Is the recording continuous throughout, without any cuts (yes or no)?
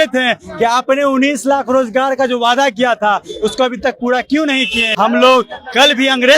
no